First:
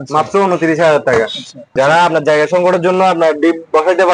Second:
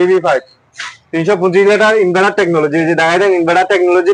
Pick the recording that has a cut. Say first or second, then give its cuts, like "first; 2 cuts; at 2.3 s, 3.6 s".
first; 1 cut; at 1.6 s